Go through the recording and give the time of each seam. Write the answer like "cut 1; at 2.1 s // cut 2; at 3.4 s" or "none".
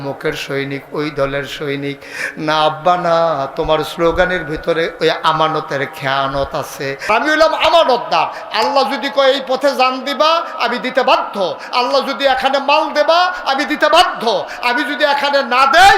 cut 1; at 7.1 s